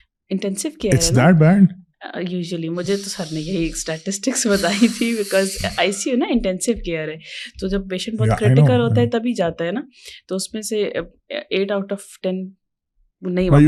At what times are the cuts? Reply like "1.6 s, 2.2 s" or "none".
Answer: none